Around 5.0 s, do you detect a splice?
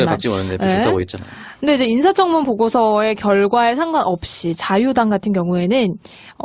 no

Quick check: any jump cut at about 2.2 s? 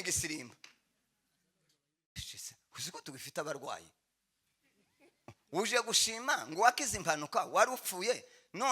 yes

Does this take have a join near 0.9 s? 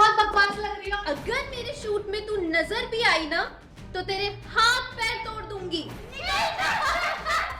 yes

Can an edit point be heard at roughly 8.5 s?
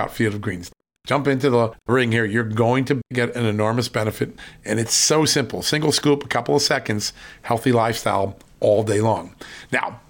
no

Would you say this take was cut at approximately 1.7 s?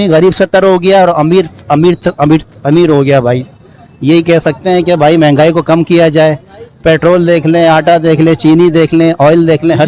no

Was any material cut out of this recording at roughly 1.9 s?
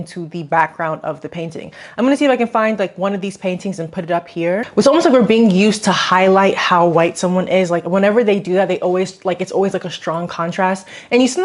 no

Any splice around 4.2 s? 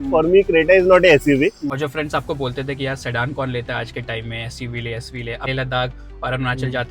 no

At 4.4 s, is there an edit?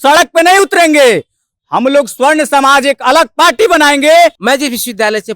yes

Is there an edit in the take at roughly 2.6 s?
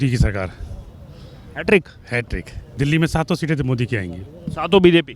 yes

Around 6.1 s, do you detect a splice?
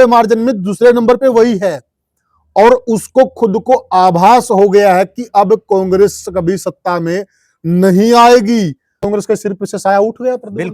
no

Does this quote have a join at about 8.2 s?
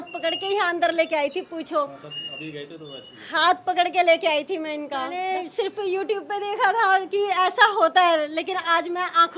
no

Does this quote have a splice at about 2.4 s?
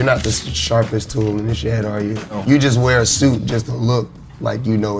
yes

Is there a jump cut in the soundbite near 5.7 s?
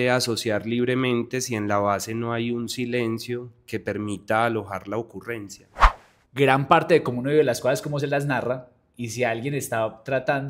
yes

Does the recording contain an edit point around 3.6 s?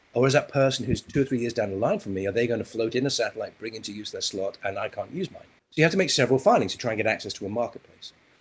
no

